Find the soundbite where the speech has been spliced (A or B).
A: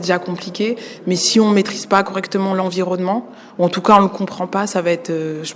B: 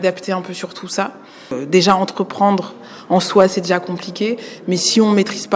B